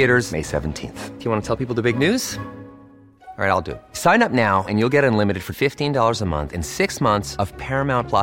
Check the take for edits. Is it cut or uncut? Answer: uncut